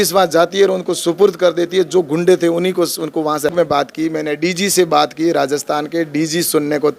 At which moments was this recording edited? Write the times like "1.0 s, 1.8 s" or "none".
3.5 s